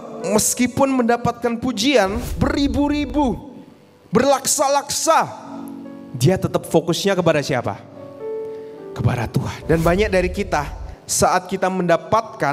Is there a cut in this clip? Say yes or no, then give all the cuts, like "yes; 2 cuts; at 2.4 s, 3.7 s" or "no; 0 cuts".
yes; 2 cuts; at 2.2 s, 9.6 s